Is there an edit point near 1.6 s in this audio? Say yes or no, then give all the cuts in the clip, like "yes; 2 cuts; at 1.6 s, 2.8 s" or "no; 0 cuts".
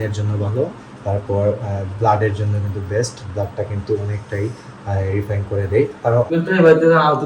no; 1 cut; at 6.3 s